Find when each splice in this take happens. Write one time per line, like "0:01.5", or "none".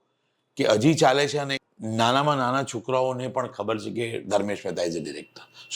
0:01.6